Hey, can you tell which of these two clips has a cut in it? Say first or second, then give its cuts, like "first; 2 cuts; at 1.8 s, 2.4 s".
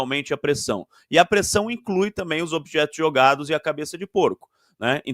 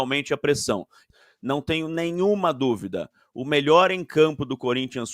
second; 1 cut; at 1.0 s